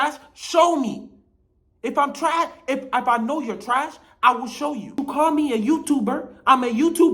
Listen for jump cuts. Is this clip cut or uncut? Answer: cut